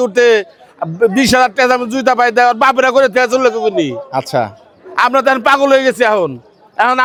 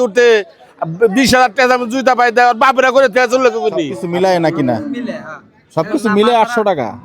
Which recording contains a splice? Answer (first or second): second